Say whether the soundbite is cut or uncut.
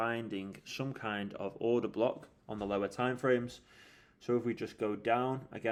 uncut